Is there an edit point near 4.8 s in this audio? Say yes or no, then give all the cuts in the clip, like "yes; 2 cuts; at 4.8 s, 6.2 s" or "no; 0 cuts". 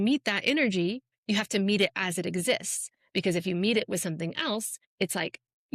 yes; 2 cuts; at 1.1 s, 4.8 s